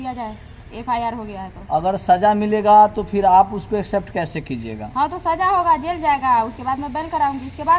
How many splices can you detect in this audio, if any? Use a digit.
0